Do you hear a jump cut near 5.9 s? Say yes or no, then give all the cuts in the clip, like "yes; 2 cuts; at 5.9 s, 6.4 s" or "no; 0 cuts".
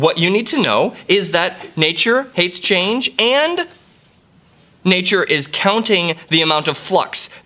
no; 0 cuts